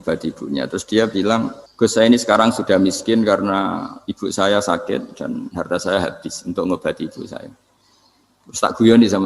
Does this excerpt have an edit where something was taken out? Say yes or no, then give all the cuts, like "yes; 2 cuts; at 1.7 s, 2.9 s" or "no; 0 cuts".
yes; 1 cut; at 1.6 s